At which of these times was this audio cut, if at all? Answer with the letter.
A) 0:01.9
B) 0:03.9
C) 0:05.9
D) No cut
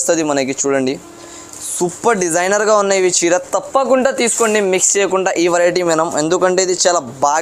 D